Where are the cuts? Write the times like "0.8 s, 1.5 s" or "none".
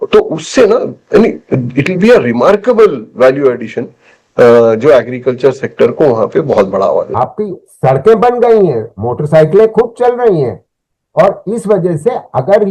7.1 s

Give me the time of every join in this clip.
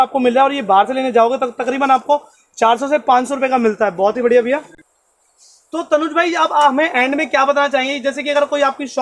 none

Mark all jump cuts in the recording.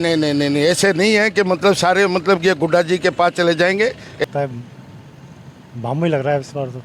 4.2 s

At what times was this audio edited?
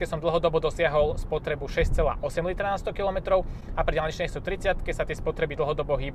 none

